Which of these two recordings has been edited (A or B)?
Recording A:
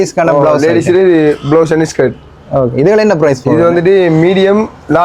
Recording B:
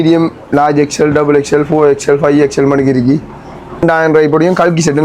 B